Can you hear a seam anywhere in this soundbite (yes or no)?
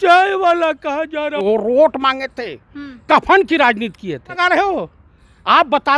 yes